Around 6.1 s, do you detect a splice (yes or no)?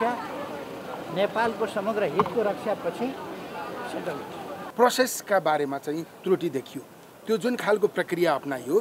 no